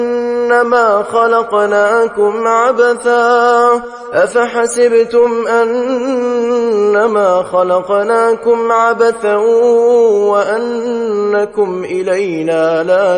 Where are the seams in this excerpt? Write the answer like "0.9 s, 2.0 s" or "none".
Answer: none

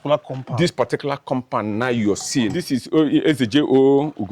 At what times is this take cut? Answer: 2.6 s

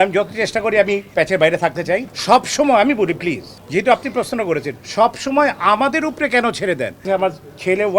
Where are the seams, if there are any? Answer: 2.1 s, 7.0 s

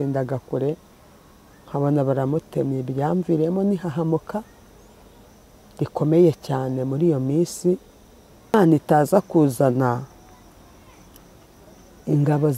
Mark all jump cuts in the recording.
8.5 s

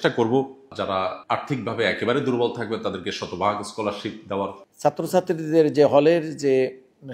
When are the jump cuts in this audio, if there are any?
0.9 s, 4.6 s

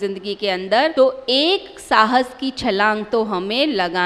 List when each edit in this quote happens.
0.9 s

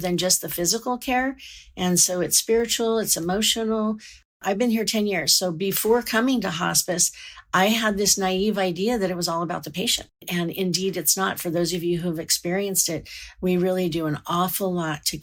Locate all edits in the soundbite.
none

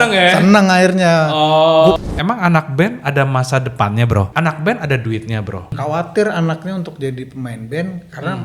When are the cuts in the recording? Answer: 2.0 s, 4.3 s, 5.8 s

